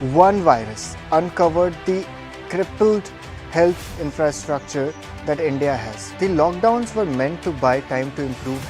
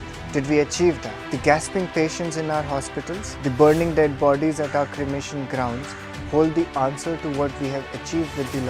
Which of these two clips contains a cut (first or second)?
first